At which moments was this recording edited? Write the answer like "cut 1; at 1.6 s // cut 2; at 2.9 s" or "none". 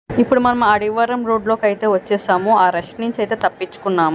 none